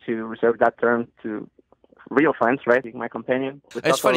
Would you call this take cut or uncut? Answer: cut